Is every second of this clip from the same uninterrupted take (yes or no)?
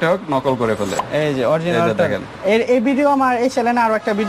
yes